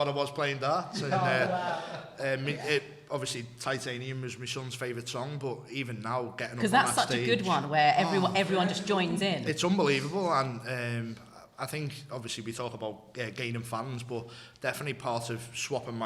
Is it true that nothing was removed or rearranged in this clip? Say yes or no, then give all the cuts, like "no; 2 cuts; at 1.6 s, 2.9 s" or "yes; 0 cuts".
yes; 0 cuts